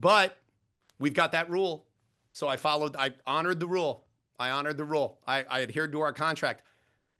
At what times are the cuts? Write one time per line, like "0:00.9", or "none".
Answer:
none